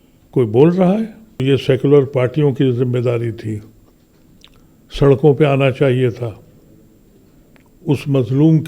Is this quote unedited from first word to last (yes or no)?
no